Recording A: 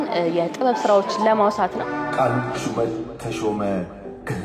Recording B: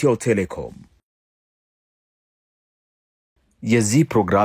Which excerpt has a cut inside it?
A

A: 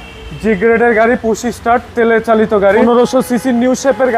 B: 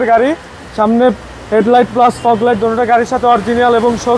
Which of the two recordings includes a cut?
A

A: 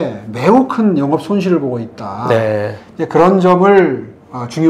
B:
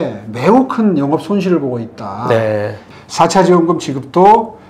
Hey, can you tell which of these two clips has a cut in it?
B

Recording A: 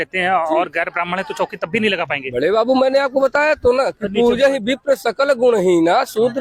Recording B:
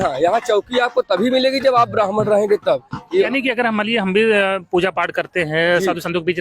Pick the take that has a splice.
B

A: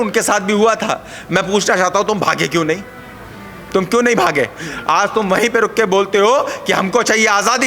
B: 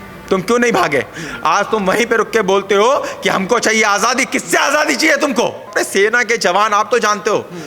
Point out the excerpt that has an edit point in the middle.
B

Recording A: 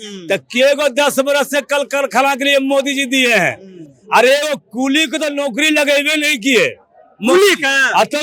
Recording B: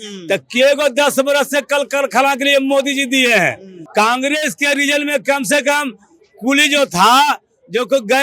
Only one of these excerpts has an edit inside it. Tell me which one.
B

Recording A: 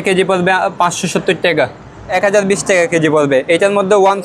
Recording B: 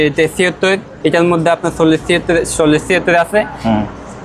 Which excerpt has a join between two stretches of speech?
A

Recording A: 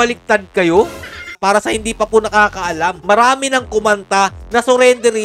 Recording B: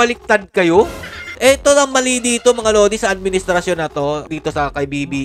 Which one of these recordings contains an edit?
A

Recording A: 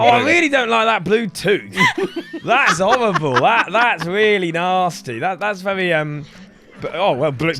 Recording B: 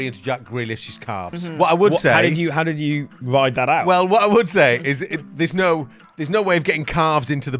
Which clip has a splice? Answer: B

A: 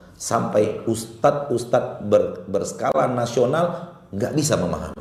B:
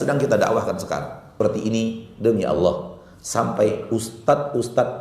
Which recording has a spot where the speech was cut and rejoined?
B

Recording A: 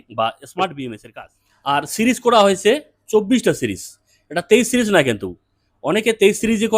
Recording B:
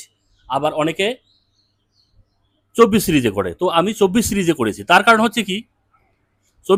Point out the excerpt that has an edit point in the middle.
A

